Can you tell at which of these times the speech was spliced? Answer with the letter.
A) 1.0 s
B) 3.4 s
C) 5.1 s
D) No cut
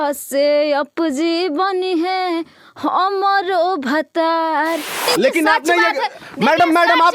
C